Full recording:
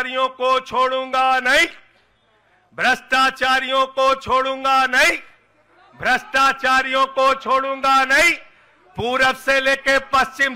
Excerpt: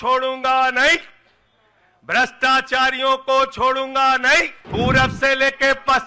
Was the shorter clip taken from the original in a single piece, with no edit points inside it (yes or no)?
no